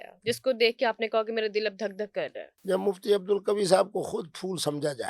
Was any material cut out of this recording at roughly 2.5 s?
yes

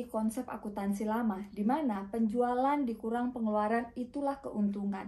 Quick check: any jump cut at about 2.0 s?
no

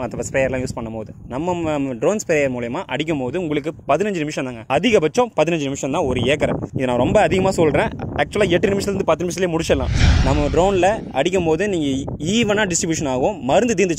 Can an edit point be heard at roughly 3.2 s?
no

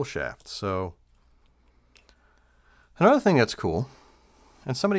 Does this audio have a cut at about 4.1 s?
no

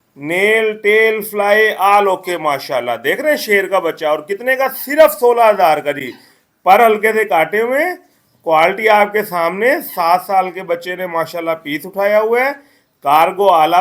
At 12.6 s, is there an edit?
no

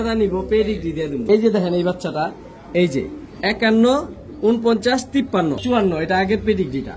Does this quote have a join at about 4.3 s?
no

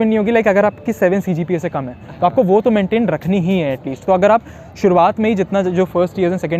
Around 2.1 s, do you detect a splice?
no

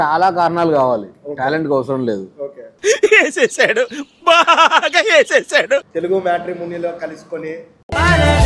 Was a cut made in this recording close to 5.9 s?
yes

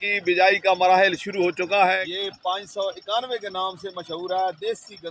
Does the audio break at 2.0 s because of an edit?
yes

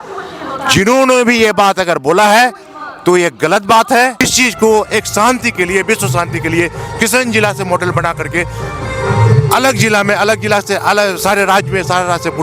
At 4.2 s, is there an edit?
yes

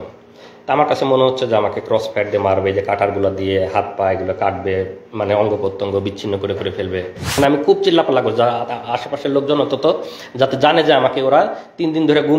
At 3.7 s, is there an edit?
no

